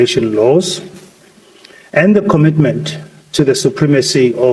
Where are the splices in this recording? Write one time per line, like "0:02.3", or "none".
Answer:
none